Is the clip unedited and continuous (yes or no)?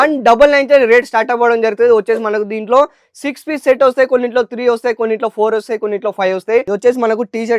no